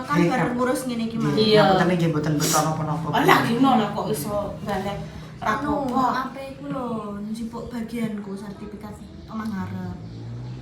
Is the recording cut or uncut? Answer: uncut